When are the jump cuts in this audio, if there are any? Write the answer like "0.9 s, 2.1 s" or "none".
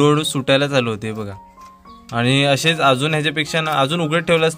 none